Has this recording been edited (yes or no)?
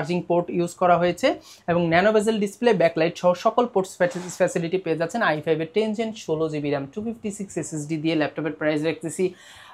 no